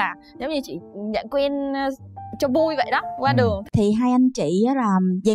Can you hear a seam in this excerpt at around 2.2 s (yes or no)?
no